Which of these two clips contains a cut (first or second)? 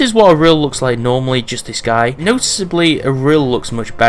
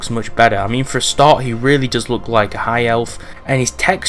first